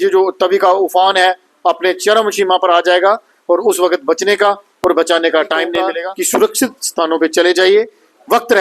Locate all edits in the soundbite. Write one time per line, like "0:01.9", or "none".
0:05.9

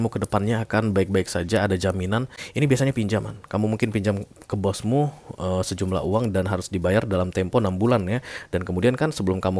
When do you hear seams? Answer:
0:02.4

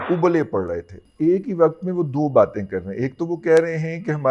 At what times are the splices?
0:01.0

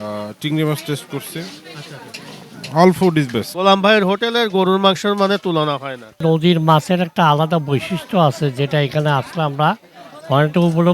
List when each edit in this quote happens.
0:03.5
0:06.2

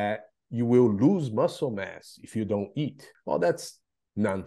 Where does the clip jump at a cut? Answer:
0:03.1

